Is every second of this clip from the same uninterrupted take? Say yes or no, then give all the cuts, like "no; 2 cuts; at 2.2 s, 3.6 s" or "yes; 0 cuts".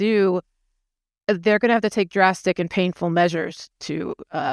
yes; 0 cuts